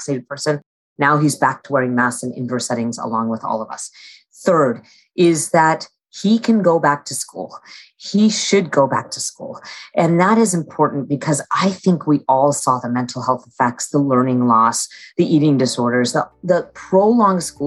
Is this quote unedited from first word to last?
yes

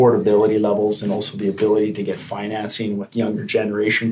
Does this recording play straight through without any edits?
yes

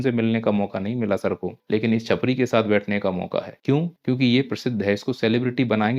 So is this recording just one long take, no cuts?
no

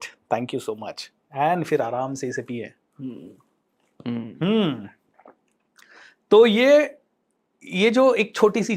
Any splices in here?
no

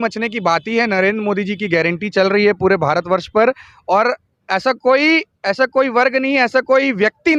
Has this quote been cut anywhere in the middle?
no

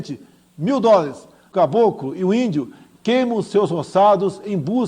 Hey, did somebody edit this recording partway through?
yes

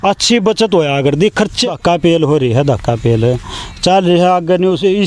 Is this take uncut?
no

